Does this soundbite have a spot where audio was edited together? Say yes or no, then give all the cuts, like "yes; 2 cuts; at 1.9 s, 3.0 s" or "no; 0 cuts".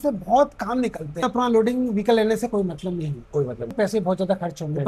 yes; 2 cuts; at 1.3 s, 3.7 s